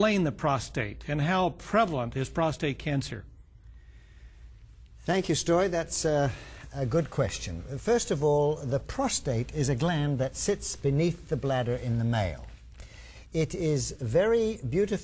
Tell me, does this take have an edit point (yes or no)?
yes